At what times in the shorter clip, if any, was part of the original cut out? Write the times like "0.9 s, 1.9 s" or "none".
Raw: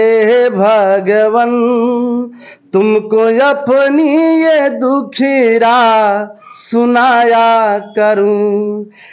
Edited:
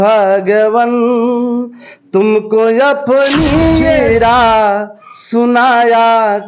4.0 s